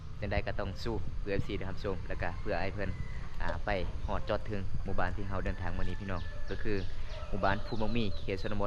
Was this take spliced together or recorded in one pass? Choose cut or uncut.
uncut